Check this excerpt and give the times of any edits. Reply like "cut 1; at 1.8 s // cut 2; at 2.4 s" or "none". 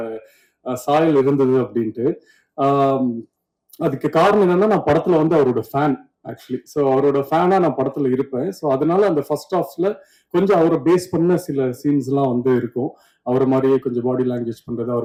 none